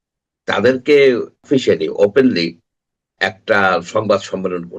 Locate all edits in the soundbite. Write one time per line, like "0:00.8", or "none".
0:01.3

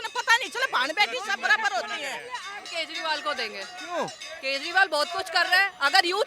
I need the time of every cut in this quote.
0:02.7

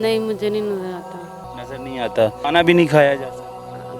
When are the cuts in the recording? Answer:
0:02.4

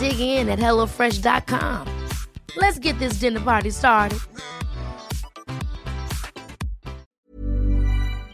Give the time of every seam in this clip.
0:07.1

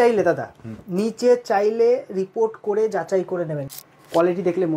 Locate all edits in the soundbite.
0:03.7

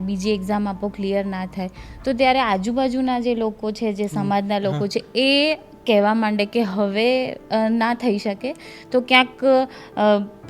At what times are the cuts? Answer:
none

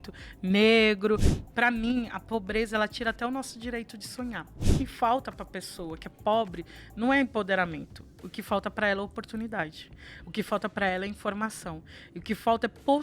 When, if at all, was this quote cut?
0:01.4
0:04.7

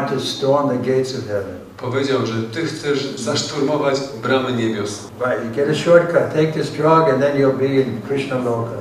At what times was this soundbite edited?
0:03.2
0:05.0

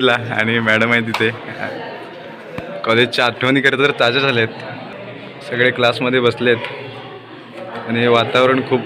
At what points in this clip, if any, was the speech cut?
0:04.8

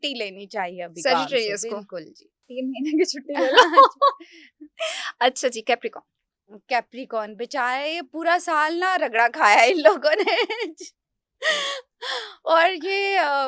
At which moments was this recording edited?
none

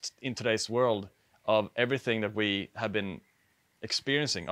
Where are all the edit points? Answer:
none

